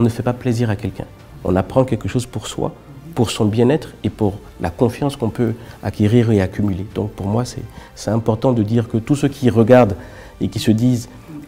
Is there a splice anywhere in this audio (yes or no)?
no